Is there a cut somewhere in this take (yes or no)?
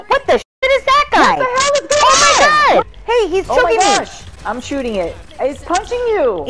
yes